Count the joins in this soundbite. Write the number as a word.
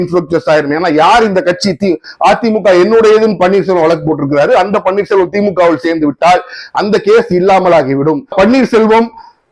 one